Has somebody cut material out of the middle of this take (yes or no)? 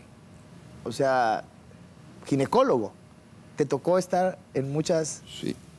no